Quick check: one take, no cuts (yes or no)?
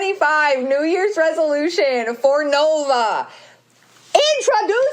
yes